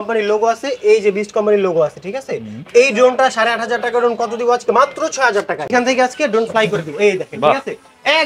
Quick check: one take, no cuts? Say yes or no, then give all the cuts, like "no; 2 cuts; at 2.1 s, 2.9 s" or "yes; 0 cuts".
no; 1 cut; at 5.7 s